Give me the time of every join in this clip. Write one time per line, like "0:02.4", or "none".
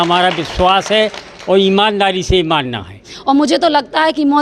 0:03.1